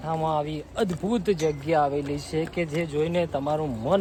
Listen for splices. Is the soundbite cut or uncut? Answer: uncut